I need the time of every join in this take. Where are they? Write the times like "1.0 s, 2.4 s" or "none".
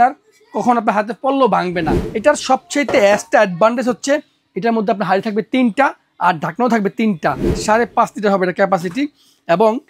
2.0 s, 7.5 s